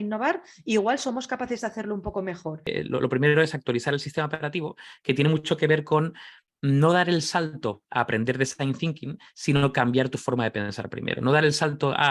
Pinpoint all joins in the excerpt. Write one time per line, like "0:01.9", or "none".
0:02.7